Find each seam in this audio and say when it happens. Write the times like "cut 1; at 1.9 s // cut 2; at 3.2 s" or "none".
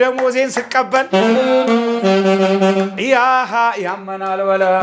none